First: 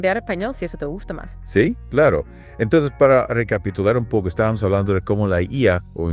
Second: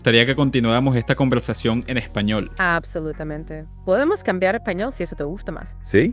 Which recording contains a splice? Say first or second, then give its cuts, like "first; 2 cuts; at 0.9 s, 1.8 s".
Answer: second; 1 cut; at 2.5 s